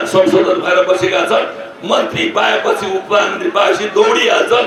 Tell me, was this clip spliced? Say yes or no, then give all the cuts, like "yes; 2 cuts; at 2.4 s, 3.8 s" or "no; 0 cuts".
no; 0 cuts